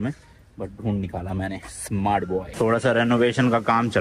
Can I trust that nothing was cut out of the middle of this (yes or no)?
yes